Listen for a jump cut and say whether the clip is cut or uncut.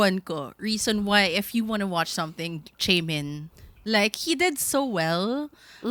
uncut